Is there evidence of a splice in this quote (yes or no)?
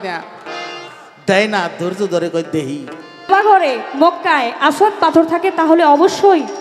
yes